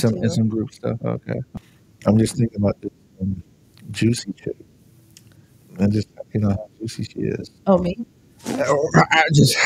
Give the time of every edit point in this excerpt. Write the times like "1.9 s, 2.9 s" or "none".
1.5 s

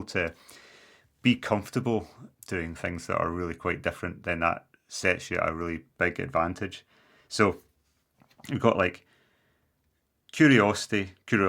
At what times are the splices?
2.2 s

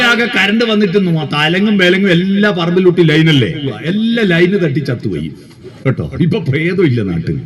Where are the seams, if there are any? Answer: 3.8 s

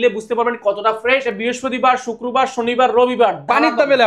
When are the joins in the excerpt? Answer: 1.3 s

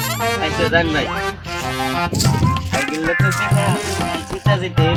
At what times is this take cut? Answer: none

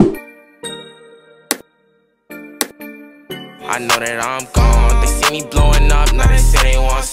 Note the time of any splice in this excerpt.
none

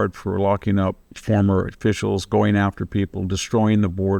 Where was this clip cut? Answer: none

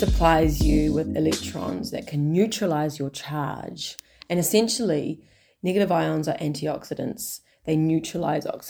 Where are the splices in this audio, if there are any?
none

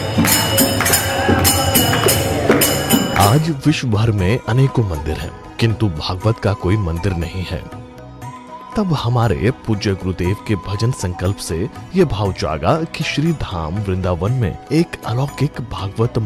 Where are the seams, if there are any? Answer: 14.5 s

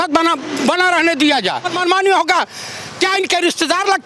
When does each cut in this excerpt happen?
1.7 s

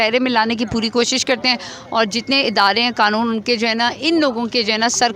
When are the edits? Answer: none

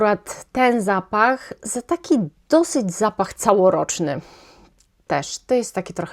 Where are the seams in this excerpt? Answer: none

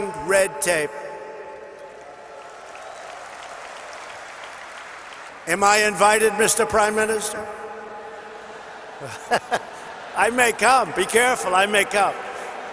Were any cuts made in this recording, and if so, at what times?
5.3 s

